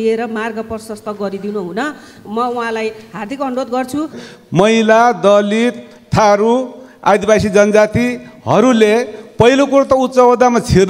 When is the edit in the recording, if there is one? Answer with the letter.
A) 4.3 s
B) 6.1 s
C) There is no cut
A